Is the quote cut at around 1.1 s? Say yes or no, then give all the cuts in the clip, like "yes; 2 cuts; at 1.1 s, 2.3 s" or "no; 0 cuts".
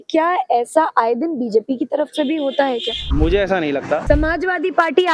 no; 2 cuts; at 3.0 s, 4.0 s